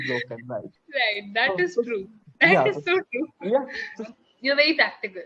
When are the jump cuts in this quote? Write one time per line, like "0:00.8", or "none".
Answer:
0:03.9

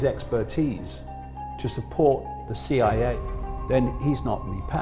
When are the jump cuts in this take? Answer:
0:03.1

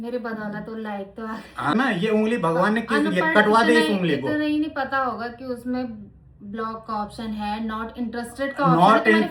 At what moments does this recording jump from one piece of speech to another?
0:01.7

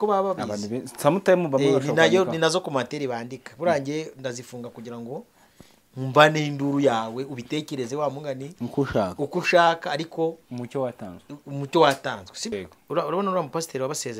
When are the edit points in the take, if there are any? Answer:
0:12.5

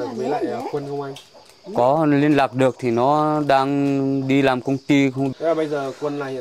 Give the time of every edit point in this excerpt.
0:05.3

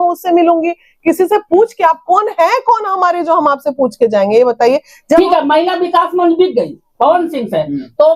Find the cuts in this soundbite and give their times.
0:05.2

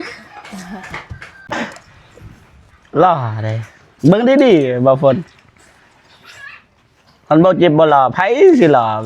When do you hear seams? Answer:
0:01.4

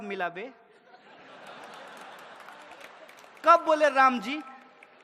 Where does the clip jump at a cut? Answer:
none

